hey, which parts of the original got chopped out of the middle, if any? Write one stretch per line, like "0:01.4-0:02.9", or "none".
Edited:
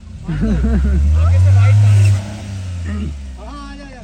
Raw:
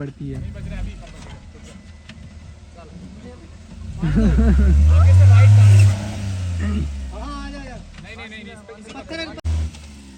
none